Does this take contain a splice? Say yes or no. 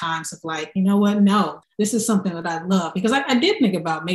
no